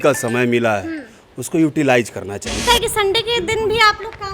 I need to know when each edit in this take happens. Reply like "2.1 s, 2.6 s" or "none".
2.6 s